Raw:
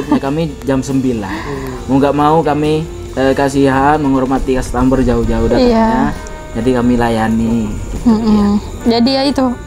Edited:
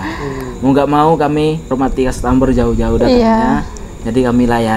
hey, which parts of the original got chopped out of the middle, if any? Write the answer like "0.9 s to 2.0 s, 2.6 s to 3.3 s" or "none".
3.0 s to 4.2 s